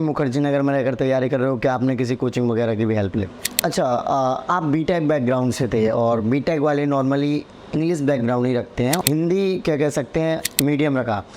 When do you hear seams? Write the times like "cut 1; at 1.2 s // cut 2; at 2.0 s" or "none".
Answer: cut 1; at 3.4 s // cut 2; at 9.0 s